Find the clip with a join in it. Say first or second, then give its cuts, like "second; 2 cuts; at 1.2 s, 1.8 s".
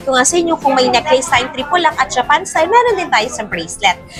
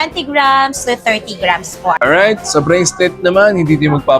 second; 1 cut; at 2.0 s